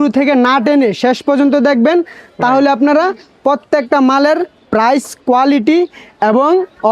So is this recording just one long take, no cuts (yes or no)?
yes